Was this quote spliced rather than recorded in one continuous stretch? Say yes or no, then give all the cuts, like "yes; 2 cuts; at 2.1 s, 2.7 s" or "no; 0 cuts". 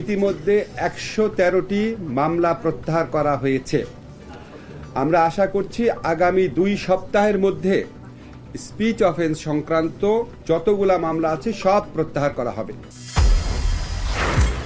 yes; 1 cut; at 12.9 s